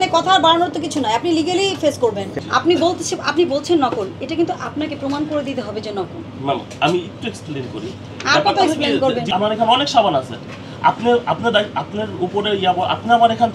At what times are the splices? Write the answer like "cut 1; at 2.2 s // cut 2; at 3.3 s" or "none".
cut 1; at 2.3 s // cut 2; at 9.2 s